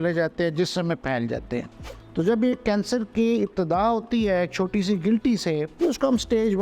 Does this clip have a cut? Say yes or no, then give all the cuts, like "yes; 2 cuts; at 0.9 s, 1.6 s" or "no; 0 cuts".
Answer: yes; 1 cut; at 5.7 s